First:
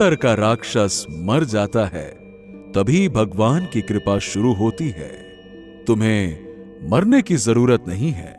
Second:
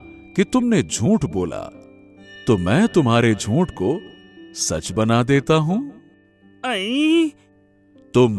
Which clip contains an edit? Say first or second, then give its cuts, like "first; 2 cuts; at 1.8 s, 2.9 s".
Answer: second; 1 cut; at 7.5 s